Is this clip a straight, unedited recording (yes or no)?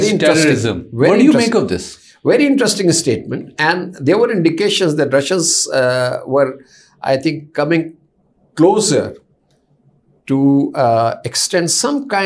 yes